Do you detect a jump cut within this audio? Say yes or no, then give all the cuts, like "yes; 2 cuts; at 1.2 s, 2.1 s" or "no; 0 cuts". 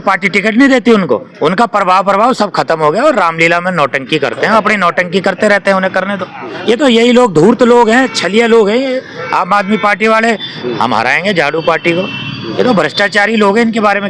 yes; 3 cuts; at 1.3 s, 6.4 s, 10.5 s